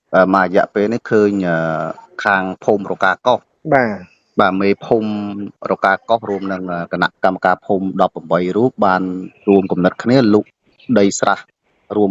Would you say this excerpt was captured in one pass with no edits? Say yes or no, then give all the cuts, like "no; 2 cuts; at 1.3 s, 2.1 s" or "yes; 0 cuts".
yes; 0 cuts